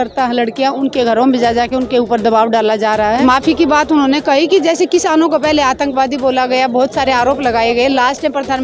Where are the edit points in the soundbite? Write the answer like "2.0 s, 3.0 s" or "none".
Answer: 3.2 s

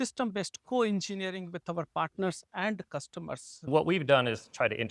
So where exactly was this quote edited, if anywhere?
3.7 s

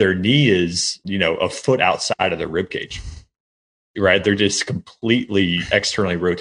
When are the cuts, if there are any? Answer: 1.0 s, 2.2 s

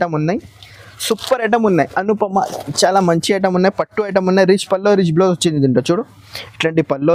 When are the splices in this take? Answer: none

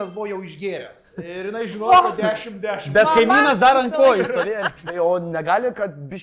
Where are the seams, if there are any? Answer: 4.8 s

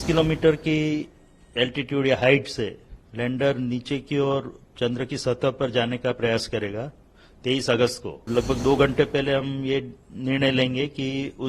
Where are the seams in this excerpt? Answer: 8.3 s

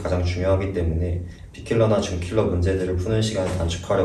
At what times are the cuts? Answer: none

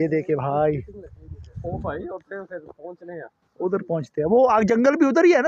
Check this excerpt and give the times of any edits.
none

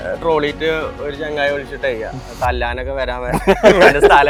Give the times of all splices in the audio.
none

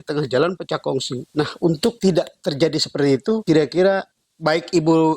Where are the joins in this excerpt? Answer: 2.0 s, 3.4 s

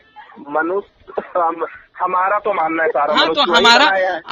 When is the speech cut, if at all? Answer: none

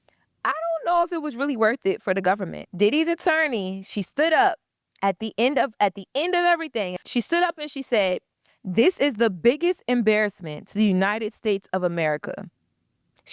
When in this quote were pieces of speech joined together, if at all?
2.6 s, 7.0 s

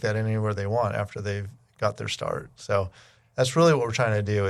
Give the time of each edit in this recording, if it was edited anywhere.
none

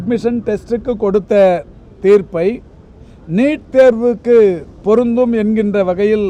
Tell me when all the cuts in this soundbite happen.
none

